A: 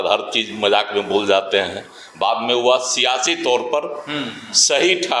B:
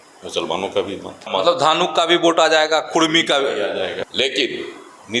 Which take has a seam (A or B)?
B